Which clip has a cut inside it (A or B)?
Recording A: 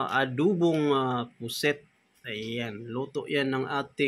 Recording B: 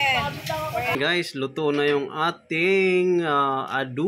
B